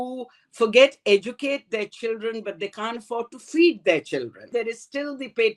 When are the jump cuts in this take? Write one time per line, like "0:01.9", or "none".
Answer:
0:04.5

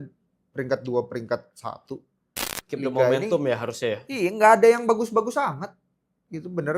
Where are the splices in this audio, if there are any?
0:02.4

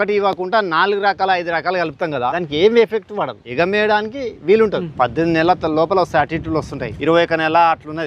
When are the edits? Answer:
0:02.3
0:03.4
0:04.9
0:06.8

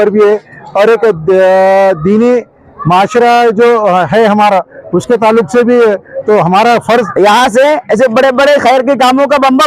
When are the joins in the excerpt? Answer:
0:07.0

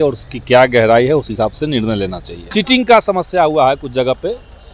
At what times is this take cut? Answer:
0:02.4

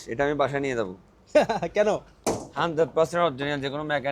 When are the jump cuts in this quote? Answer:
0:02.1

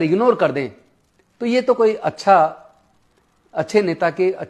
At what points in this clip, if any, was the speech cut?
none

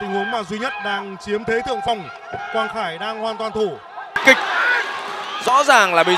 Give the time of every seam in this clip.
0:04.2

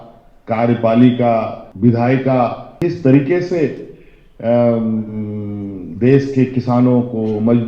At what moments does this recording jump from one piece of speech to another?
0:01.6
0:02.7

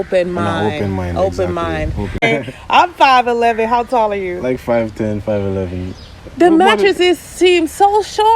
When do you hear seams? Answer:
0:02.2

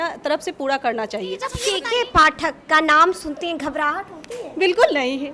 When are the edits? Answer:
0:01.6

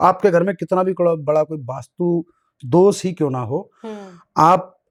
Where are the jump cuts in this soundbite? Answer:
none

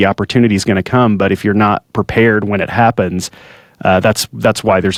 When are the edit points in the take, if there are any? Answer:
none

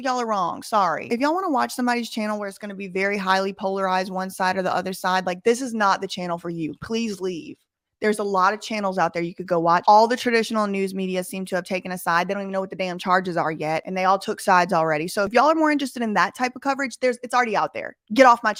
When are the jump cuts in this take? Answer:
none

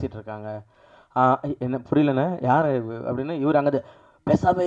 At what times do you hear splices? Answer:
none

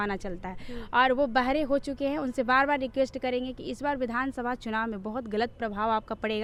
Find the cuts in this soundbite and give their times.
none

